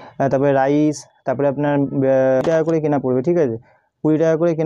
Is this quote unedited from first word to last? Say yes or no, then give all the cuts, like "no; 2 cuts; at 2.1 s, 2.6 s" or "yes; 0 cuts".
no; 1 cut; at 2.4 s